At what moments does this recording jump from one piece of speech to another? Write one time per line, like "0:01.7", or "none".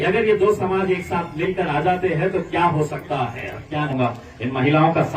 0:03.9